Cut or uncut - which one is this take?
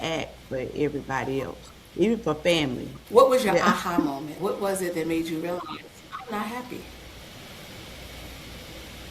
cut